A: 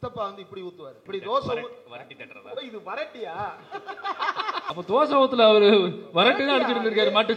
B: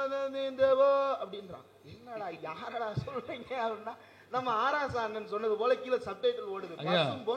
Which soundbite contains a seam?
A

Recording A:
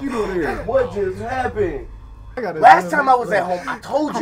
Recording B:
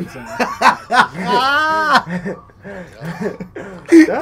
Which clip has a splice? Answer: A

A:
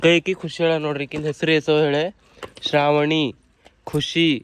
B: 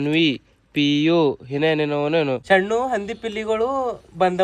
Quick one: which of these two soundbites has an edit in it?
B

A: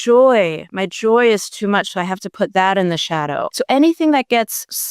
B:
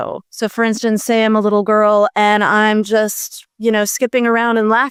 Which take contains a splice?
A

